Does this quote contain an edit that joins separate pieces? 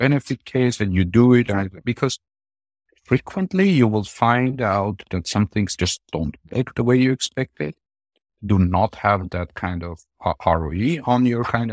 no; 0 cuts

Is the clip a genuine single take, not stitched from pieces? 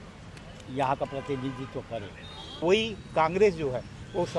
no; 1 cut; at 2.6 s

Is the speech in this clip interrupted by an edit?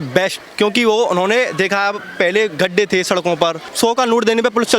yes; 1 cut; at 3.7 s

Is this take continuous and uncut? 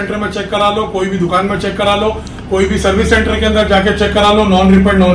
yes; 0 cuts

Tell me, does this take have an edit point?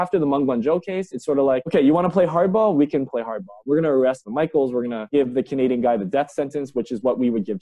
no; 0 cuts

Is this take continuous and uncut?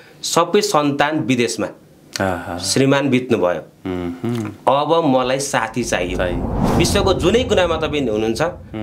no; 1 cut; at 6.6 s

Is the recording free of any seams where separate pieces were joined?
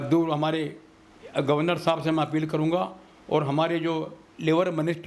yes; 0 cuts

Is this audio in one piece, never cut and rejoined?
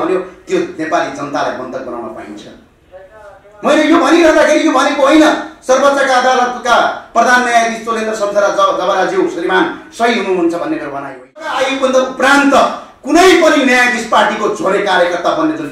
no; 1 cut; at 11.6 s

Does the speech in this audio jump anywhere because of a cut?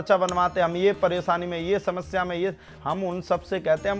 no; 0 cuts

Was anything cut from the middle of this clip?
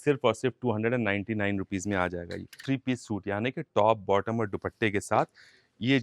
yes; 1 cut; at 2.6 s

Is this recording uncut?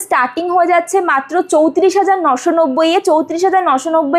yes; 0 cuts

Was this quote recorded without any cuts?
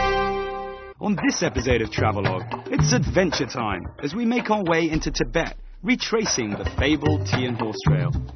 yes; 0 cuts

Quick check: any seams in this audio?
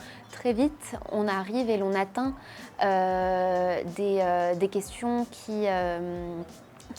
no; 0 cuts

